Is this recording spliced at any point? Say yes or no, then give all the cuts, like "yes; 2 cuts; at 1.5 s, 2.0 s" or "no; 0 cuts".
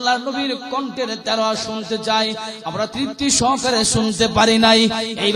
yes; 1 cut; at 2.9 s